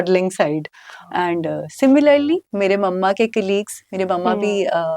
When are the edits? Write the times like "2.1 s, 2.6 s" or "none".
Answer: none